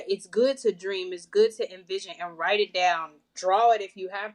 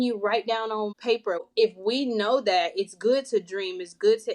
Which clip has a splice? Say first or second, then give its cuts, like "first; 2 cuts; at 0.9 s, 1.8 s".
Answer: second; 1 cut; at 1.3 s